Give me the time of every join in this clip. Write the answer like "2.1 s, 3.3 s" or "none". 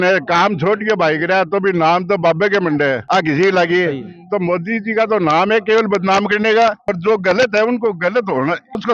none